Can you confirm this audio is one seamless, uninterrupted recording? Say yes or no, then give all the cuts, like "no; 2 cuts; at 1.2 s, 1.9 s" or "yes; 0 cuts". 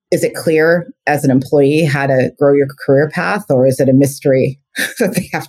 yes; 0 cuts